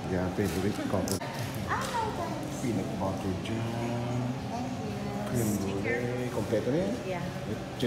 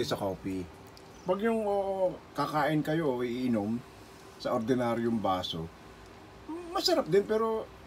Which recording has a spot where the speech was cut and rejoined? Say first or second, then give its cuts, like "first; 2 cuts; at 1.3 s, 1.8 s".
first; 1 cut; at 1.2 s